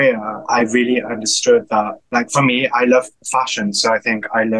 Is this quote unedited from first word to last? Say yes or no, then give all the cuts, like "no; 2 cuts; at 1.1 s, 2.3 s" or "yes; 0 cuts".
yes; 0 cuts